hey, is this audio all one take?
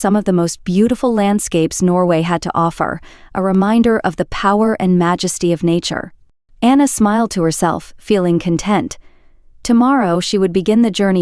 yes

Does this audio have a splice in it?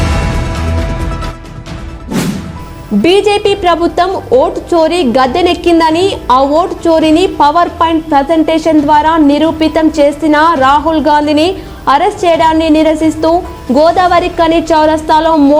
yes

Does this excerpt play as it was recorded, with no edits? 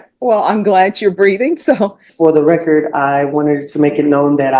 no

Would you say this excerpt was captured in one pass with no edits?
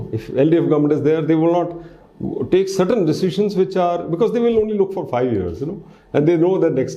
yes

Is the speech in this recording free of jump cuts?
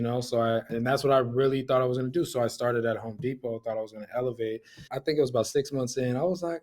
no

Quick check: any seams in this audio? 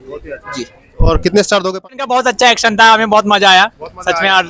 yes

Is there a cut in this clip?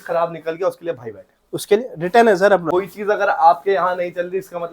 yes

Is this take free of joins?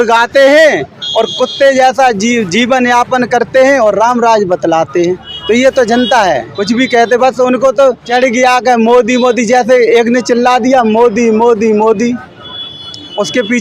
no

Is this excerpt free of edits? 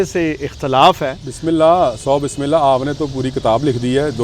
yes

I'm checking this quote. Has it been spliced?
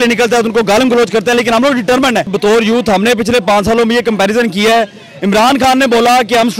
yes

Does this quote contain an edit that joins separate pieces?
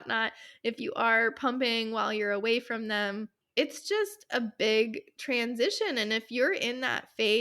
yes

